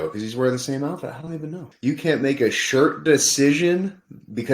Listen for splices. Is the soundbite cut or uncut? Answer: cut